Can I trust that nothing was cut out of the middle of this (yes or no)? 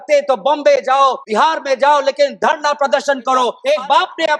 no